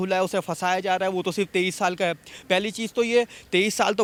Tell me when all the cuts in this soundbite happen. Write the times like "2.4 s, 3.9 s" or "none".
none